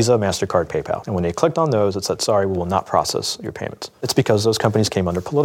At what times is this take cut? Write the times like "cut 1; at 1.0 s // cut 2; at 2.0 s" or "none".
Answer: cut 1; at 1.0 s // cut 2; at 4.1 s